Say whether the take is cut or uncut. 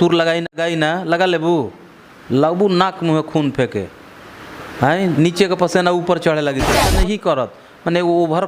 cut